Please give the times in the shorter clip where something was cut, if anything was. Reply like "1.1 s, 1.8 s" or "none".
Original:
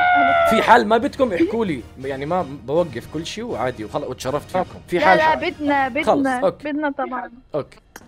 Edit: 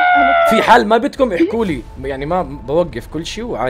none